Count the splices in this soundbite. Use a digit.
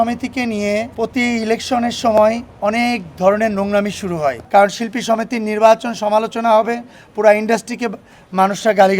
2